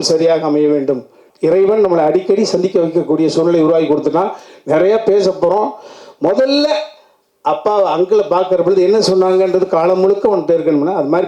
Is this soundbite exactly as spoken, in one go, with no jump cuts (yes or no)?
no